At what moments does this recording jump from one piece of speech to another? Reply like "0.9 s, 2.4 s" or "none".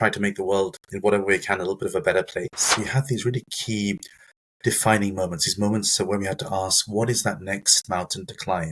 2.7 s

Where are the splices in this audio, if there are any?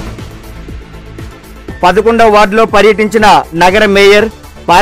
1.5 s

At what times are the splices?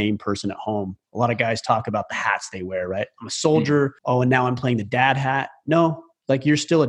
4.0 s

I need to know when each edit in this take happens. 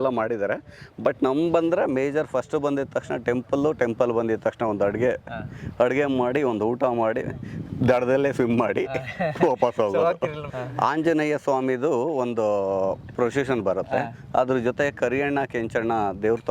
10.5 s

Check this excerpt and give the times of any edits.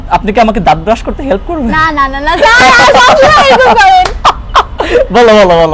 none

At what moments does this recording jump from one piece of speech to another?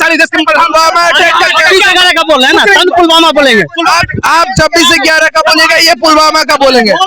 none

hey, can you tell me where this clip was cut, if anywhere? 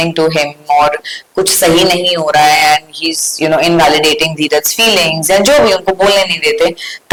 none

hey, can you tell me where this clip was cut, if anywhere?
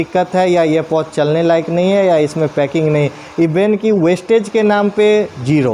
none

